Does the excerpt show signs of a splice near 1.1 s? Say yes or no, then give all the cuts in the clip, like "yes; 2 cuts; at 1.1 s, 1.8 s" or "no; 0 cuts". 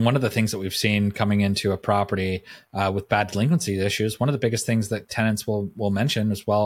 no; 0 cuts